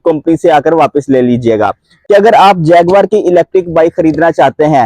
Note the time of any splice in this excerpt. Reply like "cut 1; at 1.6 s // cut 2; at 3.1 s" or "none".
cut 1; at 1.9 s